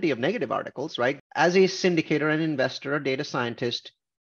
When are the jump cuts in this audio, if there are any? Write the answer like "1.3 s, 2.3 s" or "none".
1.2 s

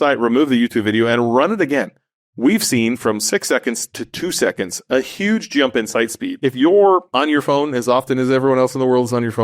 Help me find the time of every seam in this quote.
6.3 s

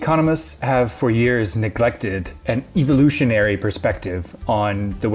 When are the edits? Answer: none

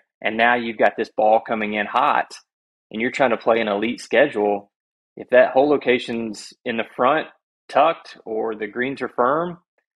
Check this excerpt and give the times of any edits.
none

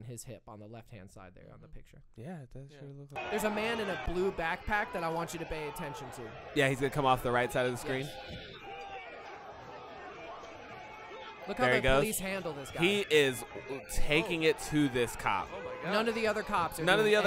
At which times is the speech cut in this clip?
3.1 s

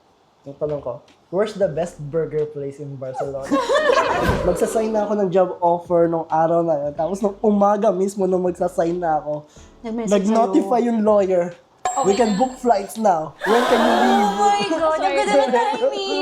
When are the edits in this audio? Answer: 4.3 s

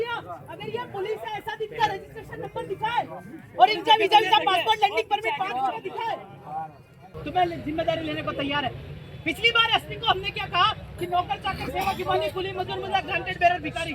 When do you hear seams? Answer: 7.2 s

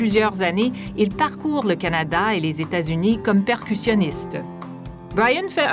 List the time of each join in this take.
4.1 s

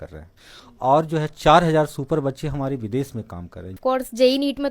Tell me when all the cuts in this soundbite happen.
3.7 s

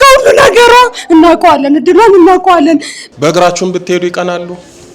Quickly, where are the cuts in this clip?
2.9 s

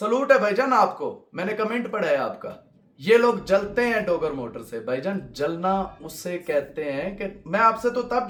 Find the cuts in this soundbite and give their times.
none

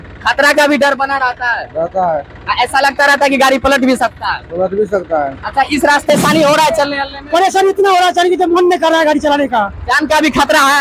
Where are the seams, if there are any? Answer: 6.1 s

